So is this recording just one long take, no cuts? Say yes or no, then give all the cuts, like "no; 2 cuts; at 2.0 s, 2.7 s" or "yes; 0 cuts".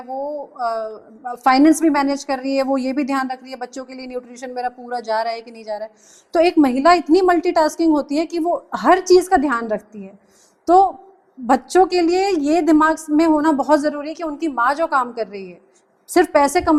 yes; 0 cuts